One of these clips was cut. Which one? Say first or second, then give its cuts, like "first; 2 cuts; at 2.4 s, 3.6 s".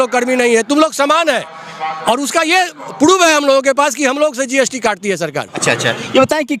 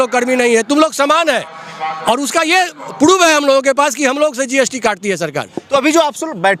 first; 1 cut; at 5.5 s